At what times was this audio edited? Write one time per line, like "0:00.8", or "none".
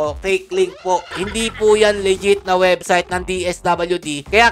0:01.1